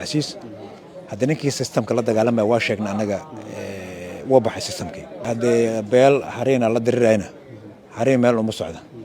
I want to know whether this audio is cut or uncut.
cut